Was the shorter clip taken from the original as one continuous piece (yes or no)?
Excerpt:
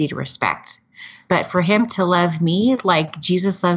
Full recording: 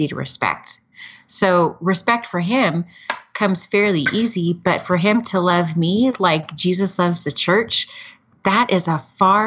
no